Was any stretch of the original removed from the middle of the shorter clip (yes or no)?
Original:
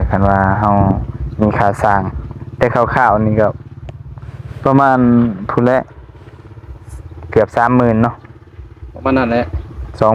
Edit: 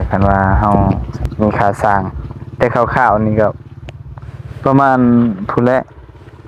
no